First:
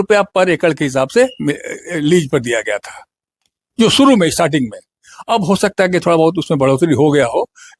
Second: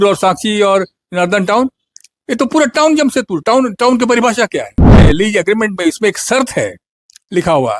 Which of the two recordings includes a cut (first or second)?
second